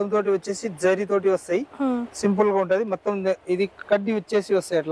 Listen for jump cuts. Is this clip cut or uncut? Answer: uncut